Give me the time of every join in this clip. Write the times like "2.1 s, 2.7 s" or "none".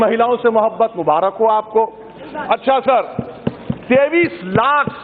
none